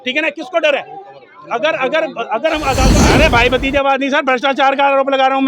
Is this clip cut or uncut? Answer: cut